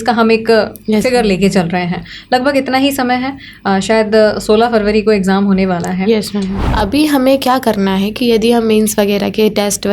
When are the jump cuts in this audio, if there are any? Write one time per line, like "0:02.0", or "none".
0:06.6